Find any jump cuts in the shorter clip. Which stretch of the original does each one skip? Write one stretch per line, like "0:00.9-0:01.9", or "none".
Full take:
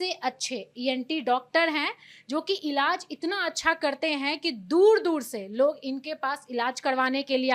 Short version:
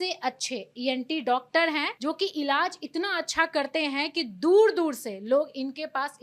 0:01.9-0:02.2